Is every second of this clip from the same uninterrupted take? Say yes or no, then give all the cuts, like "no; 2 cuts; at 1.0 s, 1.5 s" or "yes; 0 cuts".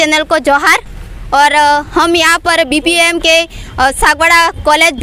yes; 0 cuts